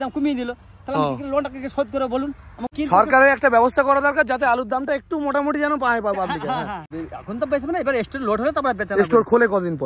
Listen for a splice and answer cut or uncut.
cut